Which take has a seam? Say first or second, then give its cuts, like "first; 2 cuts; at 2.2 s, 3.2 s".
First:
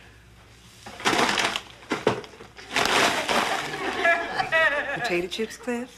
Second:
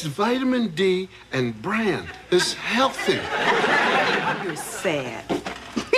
second; 1 cut; at 3.1 s